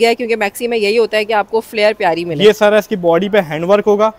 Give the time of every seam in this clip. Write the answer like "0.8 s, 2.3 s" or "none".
none

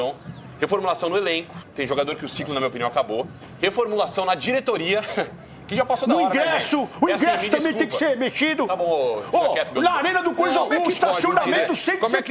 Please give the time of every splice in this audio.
none

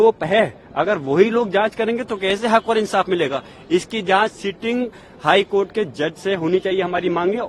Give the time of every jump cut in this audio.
none

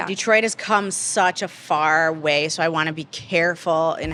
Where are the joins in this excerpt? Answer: none

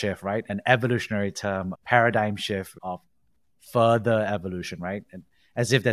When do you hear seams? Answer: none

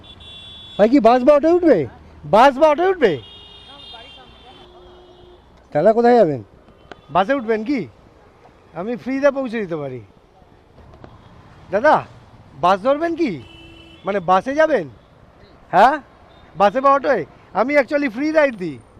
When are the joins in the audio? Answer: 4.6 s, 10.8 s

